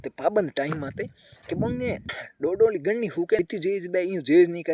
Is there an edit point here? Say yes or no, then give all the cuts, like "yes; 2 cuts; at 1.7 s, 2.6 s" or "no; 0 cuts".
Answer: yes; 2 cuts; at 2.2 s, 3.4 s